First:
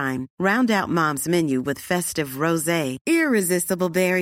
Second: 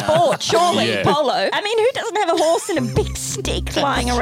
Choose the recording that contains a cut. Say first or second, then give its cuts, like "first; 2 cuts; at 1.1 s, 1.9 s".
second; 1 cut; at 1.5 s